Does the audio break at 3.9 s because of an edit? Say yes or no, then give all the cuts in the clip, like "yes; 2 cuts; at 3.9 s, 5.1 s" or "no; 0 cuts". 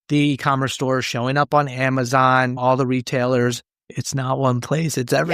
yes; 1 cut; at 3.9 s